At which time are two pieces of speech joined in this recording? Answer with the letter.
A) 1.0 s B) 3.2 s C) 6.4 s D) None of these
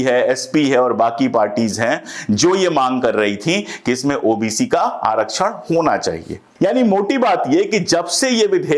C